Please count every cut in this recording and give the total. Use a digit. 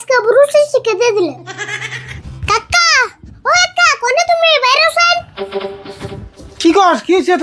1